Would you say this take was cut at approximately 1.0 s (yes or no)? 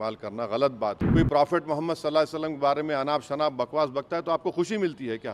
yes